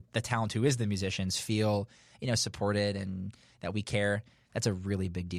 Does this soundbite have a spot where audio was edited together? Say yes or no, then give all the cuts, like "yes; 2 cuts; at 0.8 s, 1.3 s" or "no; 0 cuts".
no; 0 cuts